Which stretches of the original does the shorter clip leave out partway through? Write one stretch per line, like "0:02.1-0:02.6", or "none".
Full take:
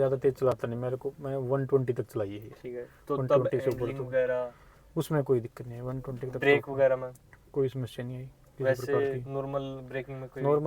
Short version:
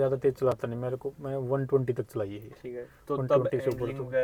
none